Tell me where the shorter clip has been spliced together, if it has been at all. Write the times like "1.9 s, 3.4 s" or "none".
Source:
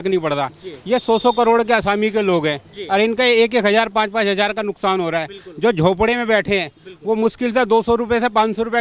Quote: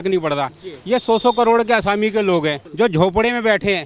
2.6 s